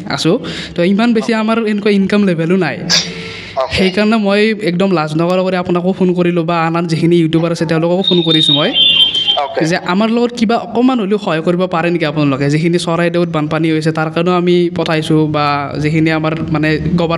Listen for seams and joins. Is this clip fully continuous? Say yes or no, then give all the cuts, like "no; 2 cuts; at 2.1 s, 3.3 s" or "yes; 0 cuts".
yes; 0 cuts